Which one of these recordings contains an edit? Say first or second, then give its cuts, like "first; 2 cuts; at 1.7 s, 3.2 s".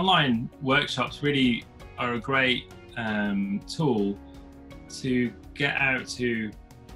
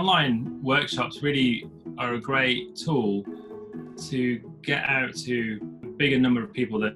second; 2 cuts; at 2.8 s, 5.8 s